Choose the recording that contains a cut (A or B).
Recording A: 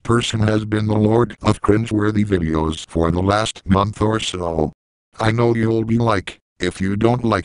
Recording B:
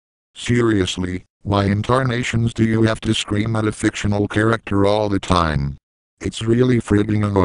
B